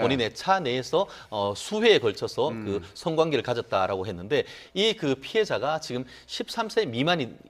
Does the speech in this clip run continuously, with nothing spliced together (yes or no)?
no